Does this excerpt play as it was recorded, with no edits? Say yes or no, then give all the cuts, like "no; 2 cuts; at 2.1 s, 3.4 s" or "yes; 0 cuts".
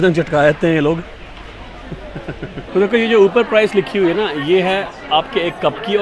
no; 1 cut; at 2.6 s